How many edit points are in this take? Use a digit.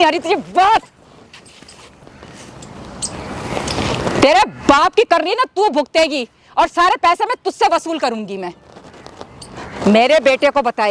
0